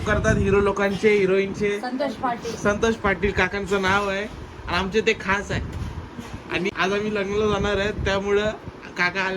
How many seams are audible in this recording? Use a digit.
1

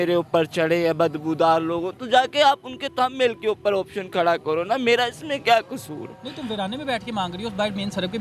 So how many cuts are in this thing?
0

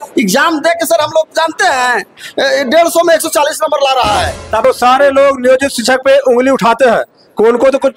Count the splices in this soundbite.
1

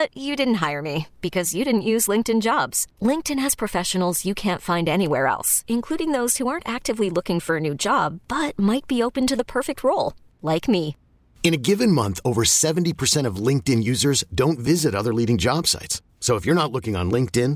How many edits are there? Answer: 0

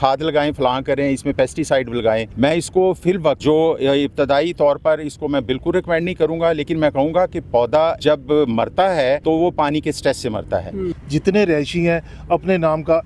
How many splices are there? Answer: 5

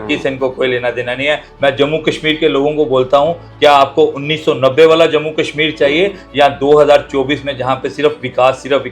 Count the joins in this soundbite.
1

